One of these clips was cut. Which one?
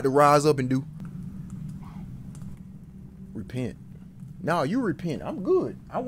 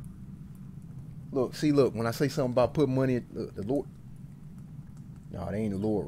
first; 1 cut; at 1.0 s

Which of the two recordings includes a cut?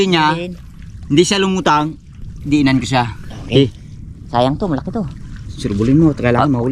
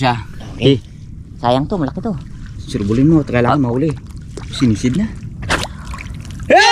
second; 1 cut; at 5.5 s

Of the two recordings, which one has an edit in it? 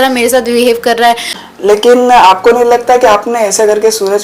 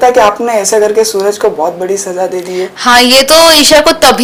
first; 1 cut; at 1.4 s

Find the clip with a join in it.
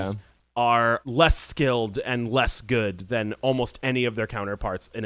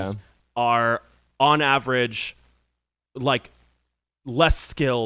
first; 1 cut; at 1.1 s

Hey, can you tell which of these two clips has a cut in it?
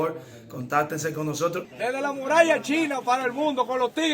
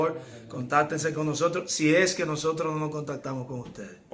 first; 1 cut; at 1.7 s

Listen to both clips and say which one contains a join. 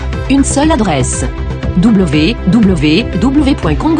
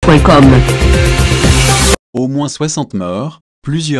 second; 1 cut; at 2.1 s

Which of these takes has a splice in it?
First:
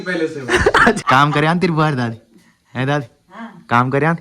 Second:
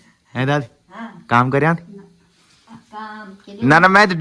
first; 1 cut; at 1.0 s

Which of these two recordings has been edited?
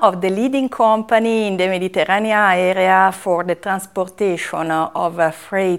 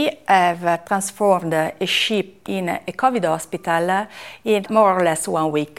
second; 3 cuts; at 0.8 s, 2.4 s, 4.7 s

